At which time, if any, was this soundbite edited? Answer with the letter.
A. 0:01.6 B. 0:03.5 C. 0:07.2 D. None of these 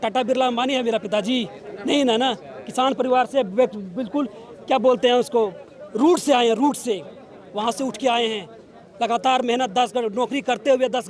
D